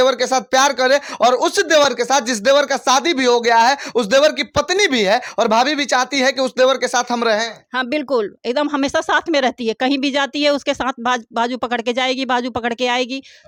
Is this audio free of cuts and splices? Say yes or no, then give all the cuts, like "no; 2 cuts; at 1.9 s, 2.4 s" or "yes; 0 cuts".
yes; 0 cuts